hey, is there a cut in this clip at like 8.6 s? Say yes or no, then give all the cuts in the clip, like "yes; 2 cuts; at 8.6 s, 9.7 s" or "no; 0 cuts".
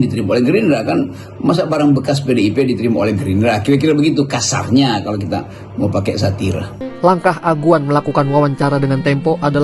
no; 1 cut; at 6.8 s